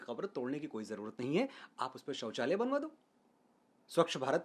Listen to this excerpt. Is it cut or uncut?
uncut